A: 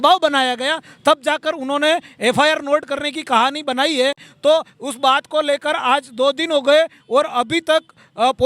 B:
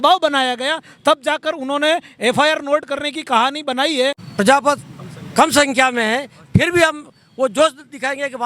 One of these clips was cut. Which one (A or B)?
B